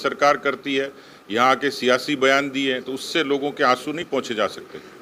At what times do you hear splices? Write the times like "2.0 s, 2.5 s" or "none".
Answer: none